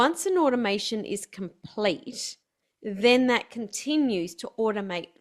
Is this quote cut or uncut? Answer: uncut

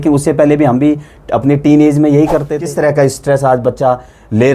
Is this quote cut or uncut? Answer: cut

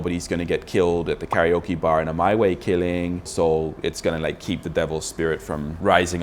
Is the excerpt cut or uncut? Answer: cut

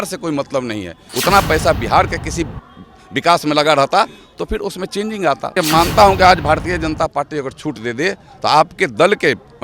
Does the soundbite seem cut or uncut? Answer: cut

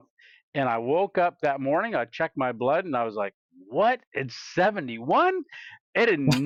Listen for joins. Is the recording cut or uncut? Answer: uncut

